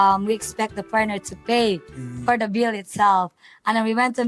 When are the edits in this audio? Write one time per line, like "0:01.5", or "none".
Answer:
none